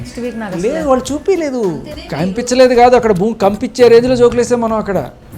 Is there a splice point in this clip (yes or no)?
yes